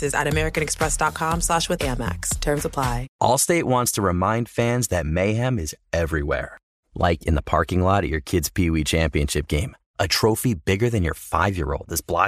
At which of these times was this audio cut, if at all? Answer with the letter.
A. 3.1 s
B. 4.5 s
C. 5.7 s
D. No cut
A